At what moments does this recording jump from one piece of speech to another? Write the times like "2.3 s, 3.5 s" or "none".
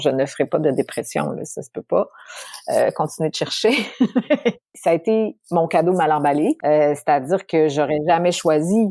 4.7 s, 6.6 s